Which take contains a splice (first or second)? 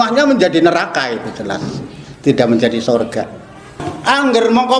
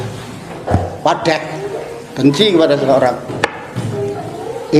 first